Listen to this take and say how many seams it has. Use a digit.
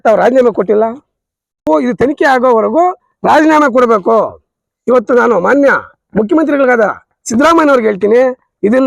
1